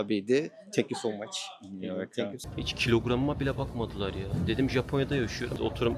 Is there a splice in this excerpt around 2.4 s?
yes; 1 cut; at 2.4 s

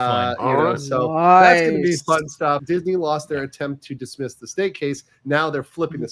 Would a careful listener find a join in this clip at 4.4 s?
no; 1 cut; at 2.6 s

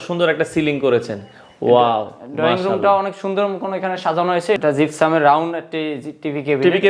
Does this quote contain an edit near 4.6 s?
yes; 1 cut; at 4.6 s

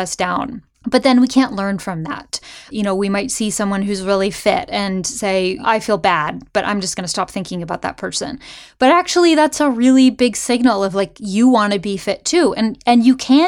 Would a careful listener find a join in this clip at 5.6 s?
yes; 2 cuts; at 2.7 s, 5.6 s

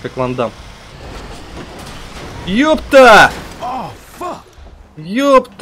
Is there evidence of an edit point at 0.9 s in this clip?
yes; 2 cuts; at 0.9 s, 4.5 s

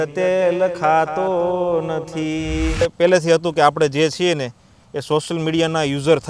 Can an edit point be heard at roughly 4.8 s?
no; 1 cut; at 2.8 s

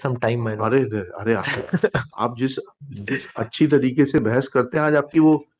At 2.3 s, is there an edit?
no; 0 cuts

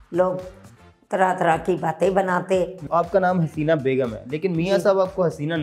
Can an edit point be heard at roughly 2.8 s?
yes; 1 cut; at 2.8 s

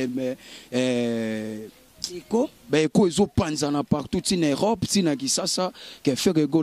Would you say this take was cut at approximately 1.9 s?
no; 0 cuts

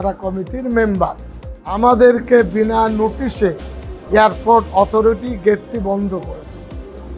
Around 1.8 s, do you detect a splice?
yes; 1 cut; at 1.8 s

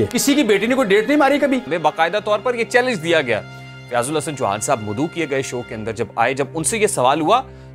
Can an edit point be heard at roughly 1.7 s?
yes; 1 cut; at 1.7 s

